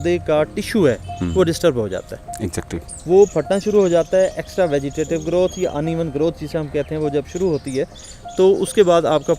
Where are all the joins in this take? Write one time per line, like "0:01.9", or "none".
none

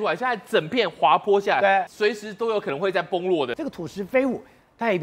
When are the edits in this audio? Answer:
0:01.9
0:03.5

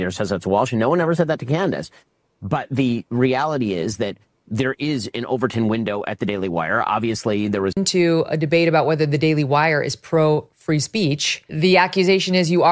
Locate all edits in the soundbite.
0:07.7

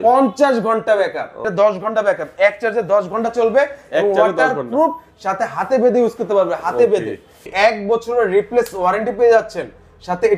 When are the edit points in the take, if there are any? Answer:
0:01.5
0:07.4

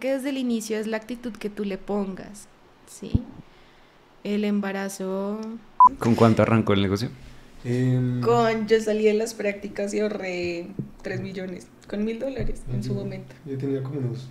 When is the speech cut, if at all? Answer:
0:05.9

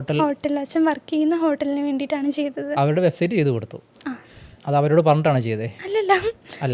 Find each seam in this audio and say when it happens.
none

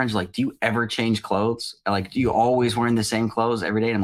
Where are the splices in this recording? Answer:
none

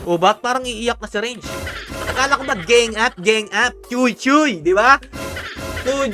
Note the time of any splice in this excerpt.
none

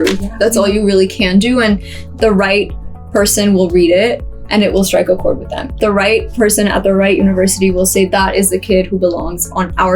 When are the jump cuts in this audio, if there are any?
0:05.8

